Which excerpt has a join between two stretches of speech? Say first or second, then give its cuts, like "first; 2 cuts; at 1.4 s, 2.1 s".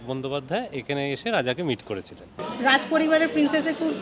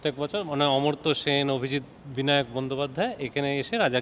first; 1 cut; at 2.4 s